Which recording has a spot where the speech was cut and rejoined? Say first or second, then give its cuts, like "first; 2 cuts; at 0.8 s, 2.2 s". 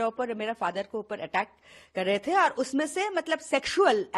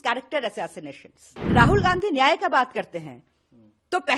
second; 1 cut; at 1.3 s